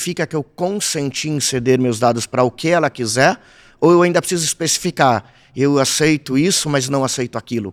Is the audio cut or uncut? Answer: uncut